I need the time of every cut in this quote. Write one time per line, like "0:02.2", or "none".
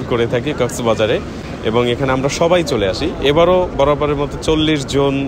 none